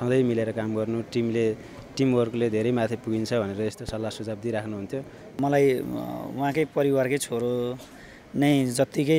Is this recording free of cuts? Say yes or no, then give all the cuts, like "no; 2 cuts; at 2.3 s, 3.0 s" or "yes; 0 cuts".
no; 1 cut; at 5.3 s